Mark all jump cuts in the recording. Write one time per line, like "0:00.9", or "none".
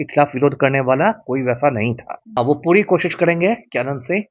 0:02.4